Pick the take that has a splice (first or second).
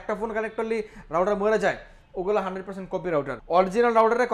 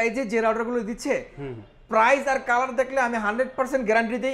first